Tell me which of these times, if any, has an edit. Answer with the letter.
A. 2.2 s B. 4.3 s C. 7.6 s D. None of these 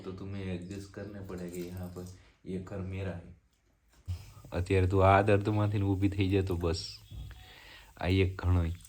B